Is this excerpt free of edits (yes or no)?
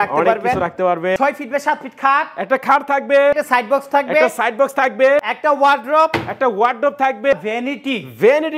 no